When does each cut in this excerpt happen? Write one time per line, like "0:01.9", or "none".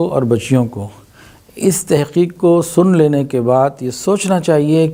none